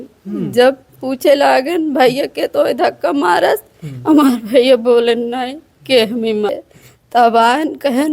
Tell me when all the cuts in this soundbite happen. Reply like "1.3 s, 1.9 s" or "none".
6.5 s